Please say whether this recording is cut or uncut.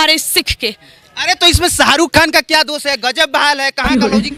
uncut